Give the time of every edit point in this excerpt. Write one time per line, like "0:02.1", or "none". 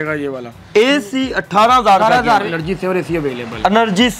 0:02.5